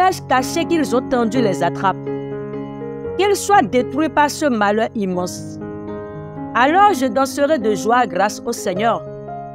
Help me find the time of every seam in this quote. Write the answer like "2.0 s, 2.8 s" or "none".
2.0 s, 3.2 s, 5.3 s, 6.5 s